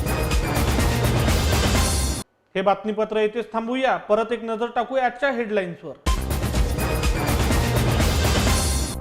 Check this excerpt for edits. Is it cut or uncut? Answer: uncut